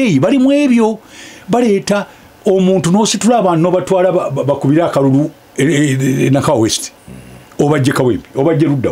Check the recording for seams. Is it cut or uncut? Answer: uncut